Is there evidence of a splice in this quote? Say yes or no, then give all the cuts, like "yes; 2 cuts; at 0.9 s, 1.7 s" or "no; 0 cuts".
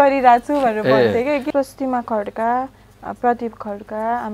yes; 1 cut; at 1.5 s